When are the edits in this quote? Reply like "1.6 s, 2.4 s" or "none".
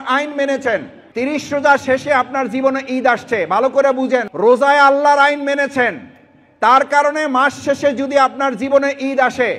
1.0 s, 4.3 s